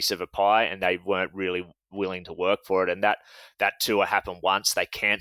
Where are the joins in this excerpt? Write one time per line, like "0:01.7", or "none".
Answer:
none